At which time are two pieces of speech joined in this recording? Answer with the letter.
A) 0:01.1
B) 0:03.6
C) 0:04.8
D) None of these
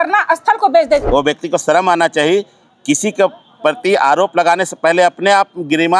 A